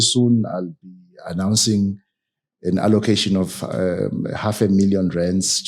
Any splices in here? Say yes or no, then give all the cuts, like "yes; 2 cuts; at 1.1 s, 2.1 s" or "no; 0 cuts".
no; 0 cuts